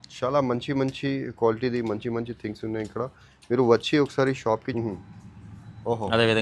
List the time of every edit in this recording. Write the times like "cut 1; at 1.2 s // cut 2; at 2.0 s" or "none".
cut 1; at 4.7 s